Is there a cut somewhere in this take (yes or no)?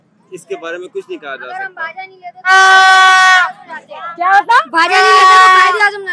no